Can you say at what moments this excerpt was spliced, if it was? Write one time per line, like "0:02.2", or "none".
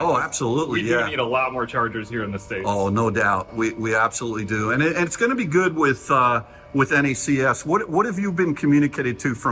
none